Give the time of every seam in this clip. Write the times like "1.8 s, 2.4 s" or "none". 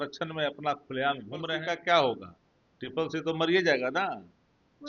1.6 s